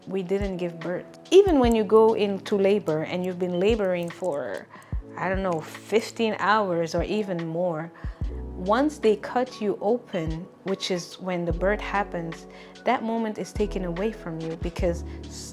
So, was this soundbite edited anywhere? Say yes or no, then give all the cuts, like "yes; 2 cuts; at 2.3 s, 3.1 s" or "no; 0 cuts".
yes; 1 cut; at 1.1 s